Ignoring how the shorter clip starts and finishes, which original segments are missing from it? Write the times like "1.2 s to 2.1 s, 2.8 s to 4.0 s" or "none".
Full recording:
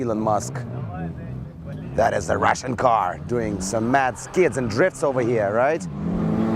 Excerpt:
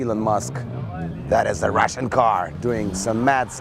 1.1 s to 1.8 s